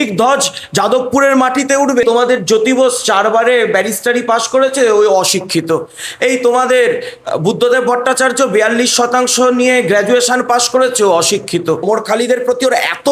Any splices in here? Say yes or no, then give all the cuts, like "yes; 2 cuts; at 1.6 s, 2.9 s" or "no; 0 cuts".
yes; 2 cuts; at 2.0 s, 11.8 s